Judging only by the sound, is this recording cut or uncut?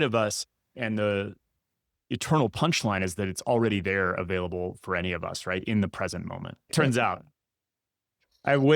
cut